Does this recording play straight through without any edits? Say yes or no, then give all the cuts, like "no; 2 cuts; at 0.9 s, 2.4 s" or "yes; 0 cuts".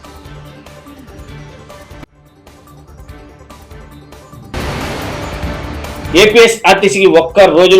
no; 1 cut; at 6.1 s